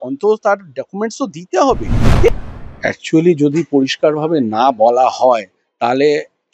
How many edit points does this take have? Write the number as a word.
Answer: one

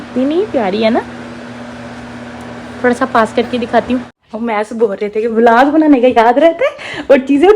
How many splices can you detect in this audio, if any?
one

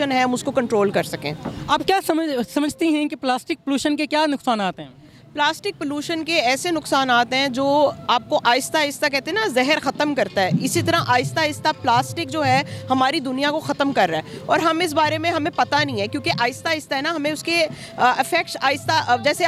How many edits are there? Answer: zero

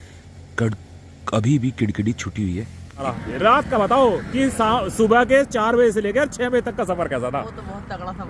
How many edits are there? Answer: one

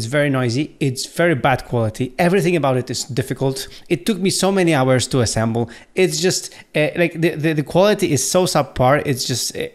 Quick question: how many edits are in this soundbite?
zero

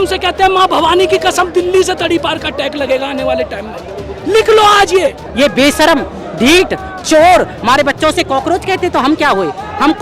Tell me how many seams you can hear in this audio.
one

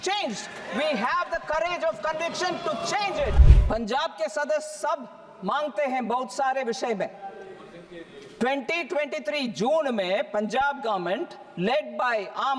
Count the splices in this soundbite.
one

